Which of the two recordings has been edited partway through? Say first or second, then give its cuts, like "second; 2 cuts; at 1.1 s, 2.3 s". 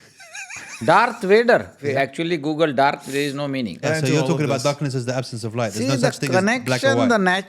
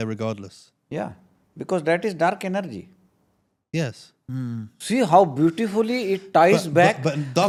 first; 2 cuts; at 1.8 s, 3.8 s